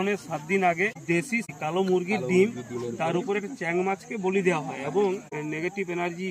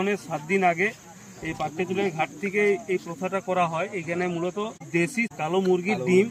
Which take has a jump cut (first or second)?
first